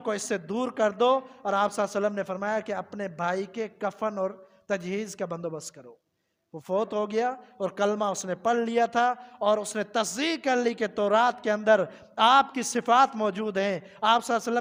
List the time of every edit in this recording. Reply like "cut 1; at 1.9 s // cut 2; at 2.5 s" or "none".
none